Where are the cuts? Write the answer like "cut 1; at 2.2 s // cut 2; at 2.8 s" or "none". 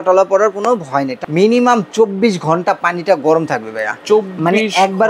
cut 1; at 1.2 s